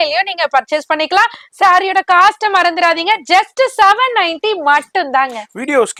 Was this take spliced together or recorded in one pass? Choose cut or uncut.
uncut